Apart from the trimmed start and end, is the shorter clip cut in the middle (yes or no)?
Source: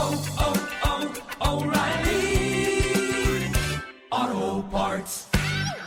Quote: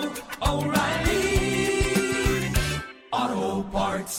no